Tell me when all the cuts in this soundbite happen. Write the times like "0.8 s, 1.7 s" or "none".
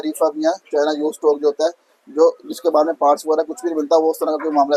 none

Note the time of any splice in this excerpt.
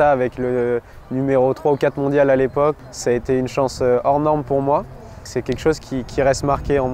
2.8 s, 5.3 s

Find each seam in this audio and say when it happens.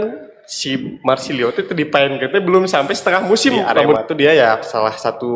4.0 s

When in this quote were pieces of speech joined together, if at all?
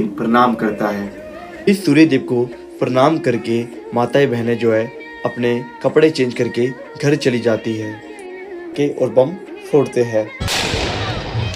1.7 s, 8.7 s

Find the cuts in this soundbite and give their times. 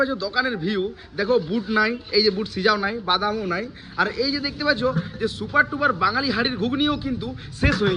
none

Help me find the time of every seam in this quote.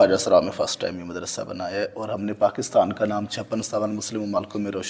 none

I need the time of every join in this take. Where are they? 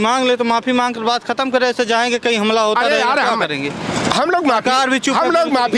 none

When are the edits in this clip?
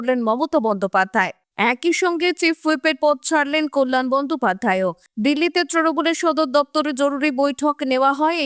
none

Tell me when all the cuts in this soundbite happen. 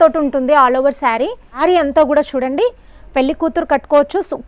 1.4 s

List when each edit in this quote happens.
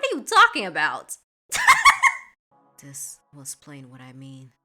2.6 s

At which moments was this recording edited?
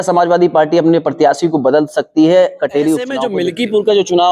3.2 s

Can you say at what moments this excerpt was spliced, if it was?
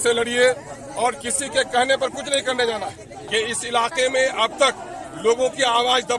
3.1 s

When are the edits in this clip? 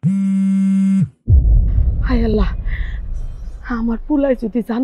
1.1 s

